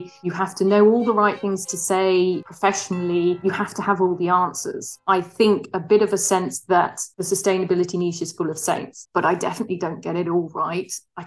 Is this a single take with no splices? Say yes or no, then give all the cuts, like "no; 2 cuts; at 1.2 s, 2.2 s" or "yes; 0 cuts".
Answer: no; 2 cuts; at 4.9 s, 9.0 s